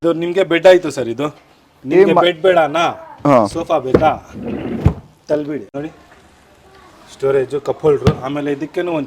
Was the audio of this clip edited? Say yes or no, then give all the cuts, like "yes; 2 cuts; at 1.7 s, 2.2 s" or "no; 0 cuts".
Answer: yes; 1 cut; at 5.7 s